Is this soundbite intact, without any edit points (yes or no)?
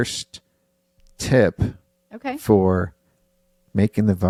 yes